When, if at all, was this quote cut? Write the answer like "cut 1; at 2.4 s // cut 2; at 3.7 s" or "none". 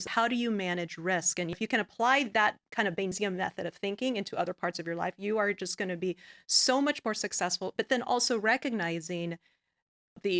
cut 1; at 1.5 s